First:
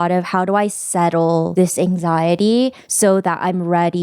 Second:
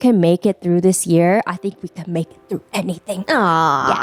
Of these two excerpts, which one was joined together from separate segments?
first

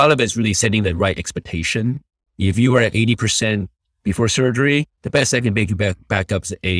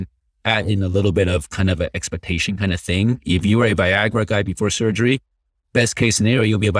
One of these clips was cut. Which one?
first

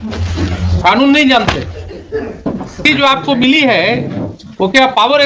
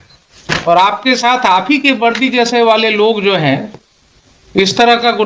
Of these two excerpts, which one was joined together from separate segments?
first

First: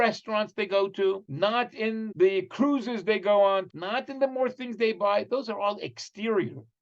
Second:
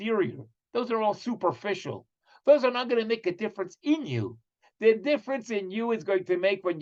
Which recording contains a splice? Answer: first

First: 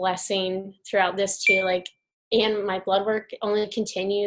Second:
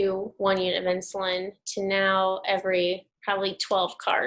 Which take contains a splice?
second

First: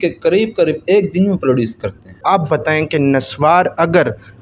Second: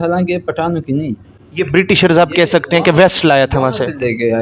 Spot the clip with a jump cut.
first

